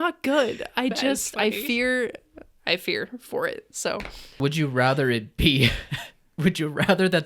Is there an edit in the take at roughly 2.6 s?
no; 1 cut; at 4.4 s

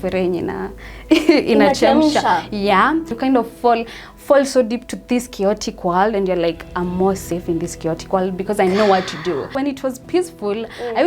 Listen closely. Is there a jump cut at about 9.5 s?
yes; 2 cuts; at 3.1 s, 9.5 s

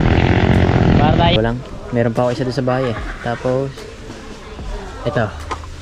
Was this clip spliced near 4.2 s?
no; 1 cut; at 1.4 s

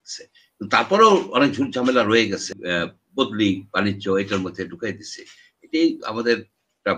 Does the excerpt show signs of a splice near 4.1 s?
no; 1 cut; at 2.6 s

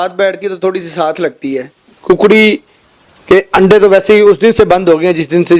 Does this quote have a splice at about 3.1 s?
no; 1 cut; at 1.9 s

